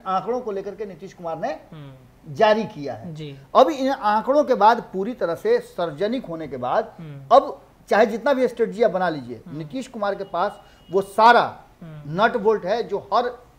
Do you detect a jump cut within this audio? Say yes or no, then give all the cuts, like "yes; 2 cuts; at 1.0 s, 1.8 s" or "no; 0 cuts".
no; 0 cuts